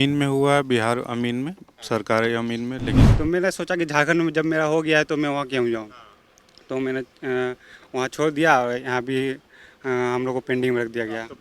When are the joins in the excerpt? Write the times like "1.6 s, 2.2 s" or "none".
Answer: 3.0 s